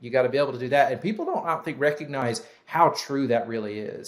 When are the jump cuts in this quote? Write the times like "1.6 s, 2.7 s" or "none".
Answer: 2.2 s